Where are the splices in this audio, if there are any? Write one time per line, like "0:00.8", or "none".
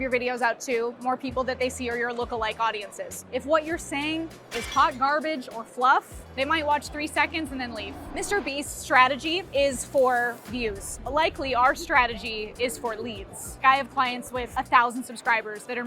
0:03.3
0:06.3
0:08.0
0:13.6